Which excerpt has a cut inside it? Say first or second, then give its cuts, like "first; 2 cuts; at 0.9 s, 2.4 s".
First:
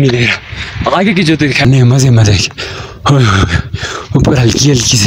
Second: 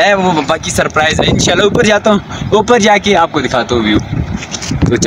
first; 1 cut; at 1.6 s